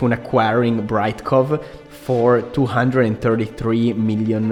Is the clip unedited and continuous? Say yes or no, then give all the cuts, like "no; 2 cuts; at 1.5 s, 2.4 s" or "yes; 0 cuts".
yes; 0 cuts